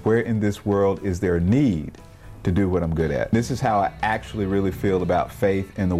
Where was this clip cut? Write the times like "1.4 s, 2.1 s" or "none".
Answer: 3.3 s

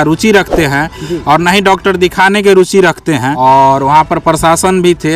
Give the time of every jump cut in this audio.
3.3 s

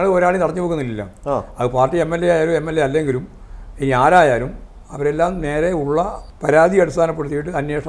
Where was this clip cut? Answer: 6.3 s

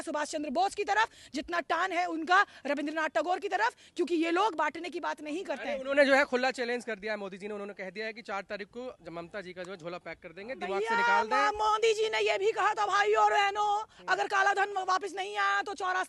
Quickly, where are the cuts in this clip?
none

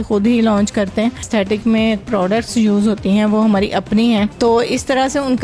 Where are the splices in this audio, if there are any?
1.2 s, 4.3 s

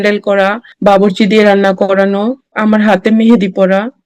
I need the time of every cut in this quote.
2.6 s

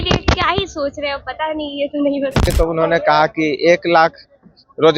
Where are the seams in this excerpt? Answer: 2.5 s

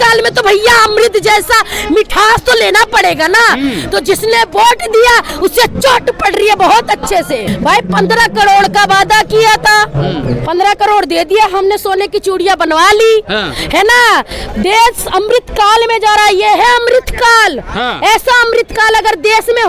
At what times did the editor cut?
7.5 s, 14.4 s

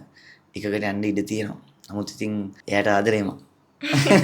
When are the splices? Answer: 2.6 s

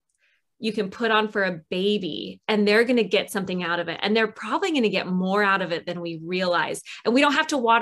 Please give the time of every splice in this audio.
none

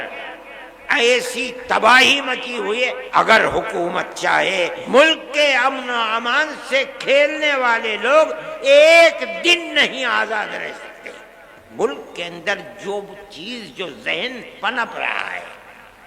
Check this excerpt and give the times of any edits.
3.0 s, 4.8 s, 11.7 s

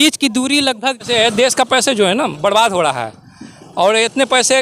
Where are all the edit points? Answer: 1.0 s

